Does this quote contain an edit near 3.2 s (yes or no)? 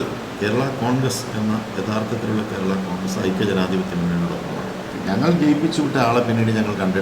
no